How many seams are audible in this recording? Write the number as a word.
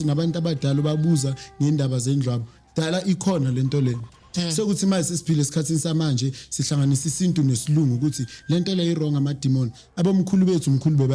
zero